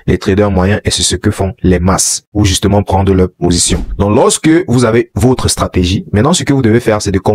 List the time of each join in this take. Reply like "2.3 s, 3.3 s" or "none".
3.8 s